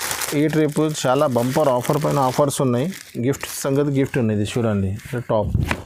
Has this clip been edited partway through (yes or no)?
no